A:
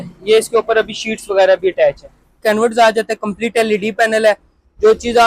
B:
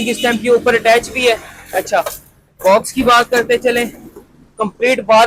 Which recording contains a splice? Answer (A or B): A